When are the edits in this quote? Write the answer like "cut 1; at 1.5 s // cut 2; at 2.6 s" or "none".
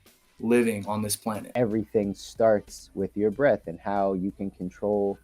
cut 1; at 1.5 s